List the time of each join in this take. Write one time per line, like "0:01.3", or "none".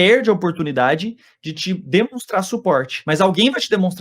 0:02.9